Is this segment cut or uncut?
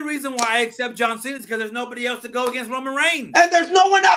uncut